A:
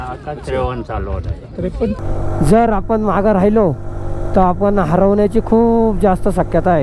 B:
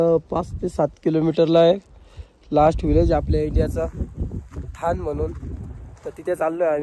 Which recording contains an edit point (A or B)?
A